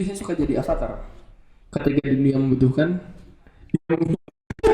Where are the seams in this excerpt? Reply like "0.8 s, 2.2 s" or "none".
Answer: none